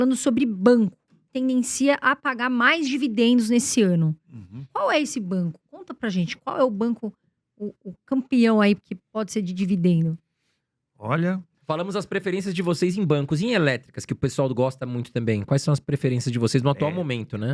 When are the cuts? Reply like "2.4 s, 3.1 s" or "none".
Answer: 1.3 s, 11.5 s